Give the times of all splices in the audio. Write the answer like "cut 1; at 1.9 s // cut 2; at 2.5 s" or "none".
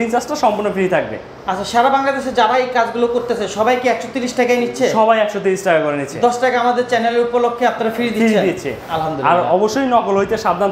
none